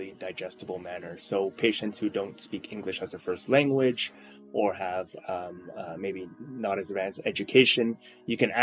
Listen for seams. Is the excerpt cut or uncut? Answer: uncut